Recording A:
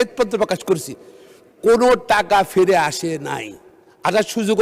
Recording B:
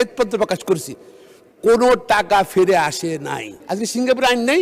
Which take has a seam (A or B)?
B